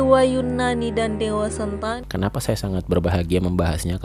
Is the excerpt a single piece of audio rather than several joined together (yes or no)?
no